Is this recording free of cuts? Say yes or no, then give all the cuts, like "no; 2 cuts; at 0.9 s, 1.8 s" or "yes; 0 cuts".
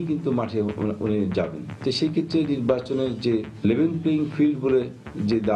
yes; 0 cuts